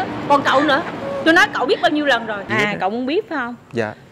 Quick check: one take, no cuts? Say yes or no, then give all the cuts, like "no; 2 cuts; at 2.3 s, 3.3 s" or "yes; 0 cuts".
no; 1 cut; at 2.5 s